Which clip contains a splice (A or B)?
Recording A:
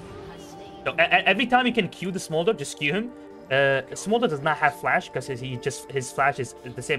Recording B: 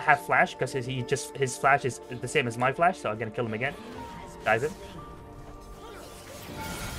A